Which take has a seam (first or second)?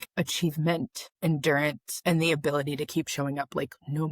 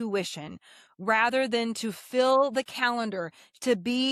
first